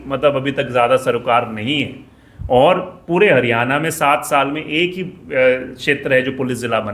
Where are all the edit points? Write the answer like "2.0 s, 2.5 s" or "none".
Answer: none